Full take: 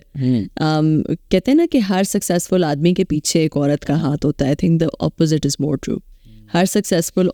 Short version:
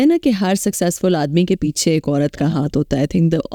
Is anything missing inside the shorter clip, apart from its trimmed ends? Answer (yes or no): no